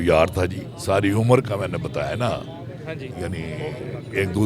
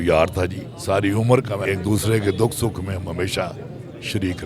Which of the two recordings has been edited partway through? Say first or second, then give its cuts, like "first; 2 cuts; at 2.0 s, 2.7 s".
second; 1 cut; at 1.6 s